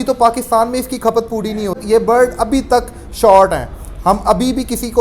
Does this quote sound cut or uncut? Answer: cut